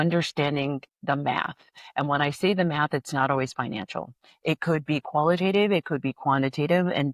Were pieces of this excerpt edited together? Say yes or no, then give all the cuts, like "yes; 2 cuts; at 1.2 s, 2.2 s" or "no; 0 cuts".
yes; 1 cut; at 0.9 s